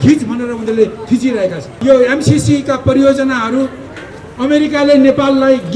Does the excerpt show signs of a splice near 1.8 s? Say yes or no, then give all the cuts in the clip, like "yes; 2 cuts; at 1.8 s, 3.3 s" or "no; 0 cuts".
yes; 1 cut; at 1.8 s